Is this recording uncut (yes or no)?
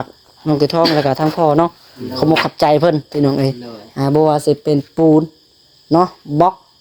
yes